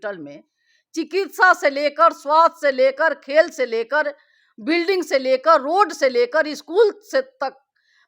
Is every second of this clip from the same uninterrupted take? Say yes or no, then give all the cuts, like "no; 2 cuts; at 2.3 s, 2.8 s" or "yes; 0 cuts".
yes; 0 cuts